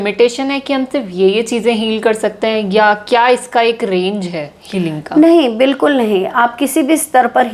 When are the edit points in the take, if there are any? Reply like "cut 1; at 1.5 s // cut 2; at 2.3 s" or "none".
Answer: none